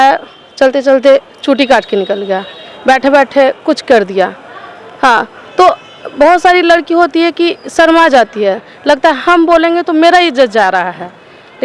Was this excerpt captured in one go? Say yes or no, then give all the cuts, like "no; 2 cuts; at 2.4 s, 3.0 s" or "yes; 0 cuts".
yes; 0 cuts